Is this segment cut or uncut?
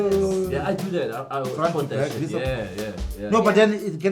uncut